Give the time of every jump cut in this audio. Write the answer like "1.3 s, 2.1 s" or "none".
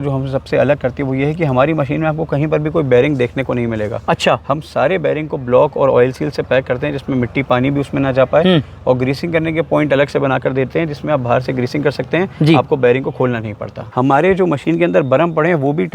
13.9 s